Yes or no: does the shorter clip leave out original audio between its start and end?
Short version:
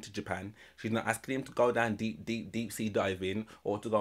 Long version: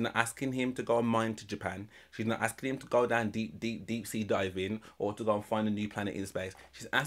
no